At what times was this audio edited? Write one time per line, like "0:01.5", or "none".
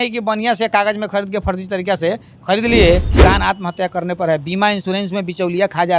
0:03.1